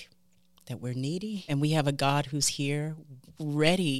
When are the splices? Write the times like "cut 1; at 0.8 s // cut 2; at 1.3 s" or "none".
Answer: cut 1; at 1.5 s